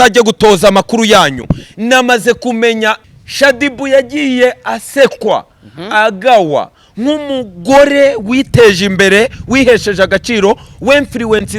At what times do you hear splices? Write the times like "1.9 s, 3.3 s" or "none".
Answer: 3.1 s